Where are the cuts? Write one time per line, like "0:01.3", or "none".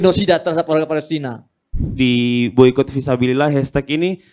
0:01.8